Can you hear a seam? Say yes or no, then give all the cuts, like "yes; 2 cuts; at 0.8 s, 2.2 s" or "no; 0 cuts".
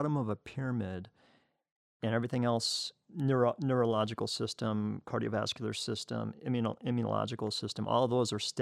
no; 0 cuts